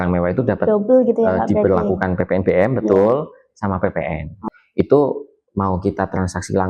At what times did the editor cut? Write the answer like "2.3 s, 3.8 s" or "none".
4.4 s